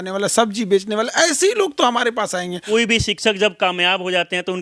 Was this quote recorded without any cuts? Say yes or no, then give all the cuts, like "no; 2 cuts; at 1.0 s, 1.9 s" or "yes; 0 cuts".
no; 1 cut; at 2.6 s